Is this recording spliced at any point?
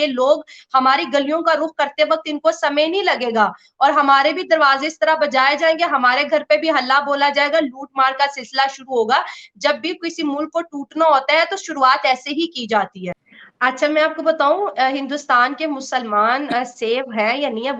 yes; 1 cut; at 13.2 s

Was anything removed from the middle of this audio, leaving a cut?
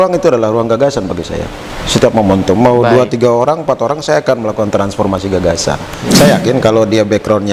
yes; 1 cut; at 5.9 s

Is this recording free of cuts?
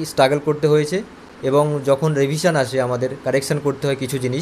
yes; 0 cuts

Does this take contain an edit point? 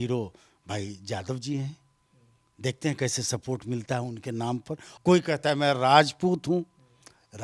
yes; 1 cut; at 4.8 s

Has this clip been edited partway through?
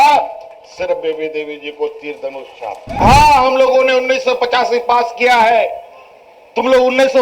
yes; 1 cut; at 3.0 s

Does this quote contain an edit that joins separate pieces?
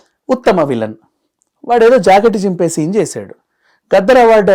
no; 0 cuts

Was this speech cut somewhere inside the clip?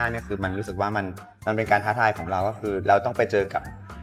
no; 0 cuts

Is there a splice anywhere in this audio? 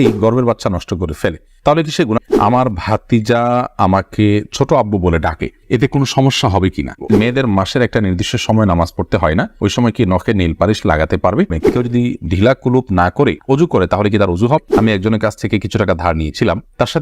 yes; 4 cuts; at 2.2 s, 7.1 s, 11.7 s, 14.8 s

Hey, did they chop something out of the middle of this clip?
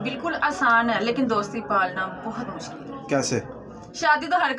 no; 0 cuts

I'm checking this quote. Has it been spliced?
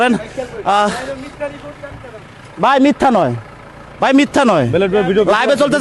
no; 0 cuts

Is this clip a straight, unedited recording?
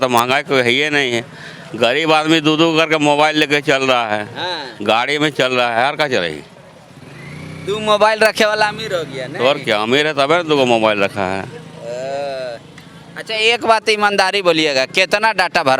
yes; 0 cuts

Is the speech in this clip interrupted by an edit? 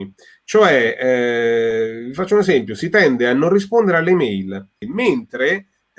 yes; 1 cut; at 4.9 s

